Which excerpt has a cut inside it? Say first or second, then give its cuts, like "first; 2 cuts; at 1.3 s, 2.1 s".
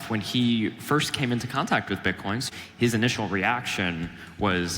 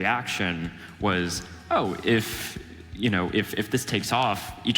first; 1 cut; at 2.4 s